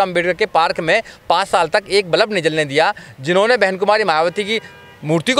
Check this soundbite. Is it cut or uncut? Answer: uncut